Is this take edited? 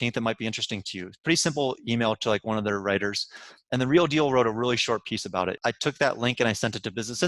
yes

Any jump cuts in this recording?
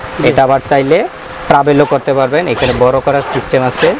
no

